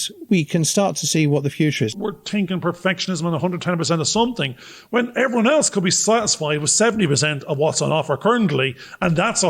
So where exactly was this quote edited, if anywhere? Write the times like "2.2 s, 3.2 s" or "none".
1.9 s